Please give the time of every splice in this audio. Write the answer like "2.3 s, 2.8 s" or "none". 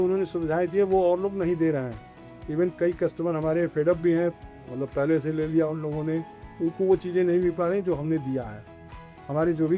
none